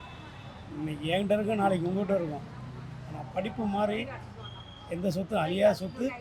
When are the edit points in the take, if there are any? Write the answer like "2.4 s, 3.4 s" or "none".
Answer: none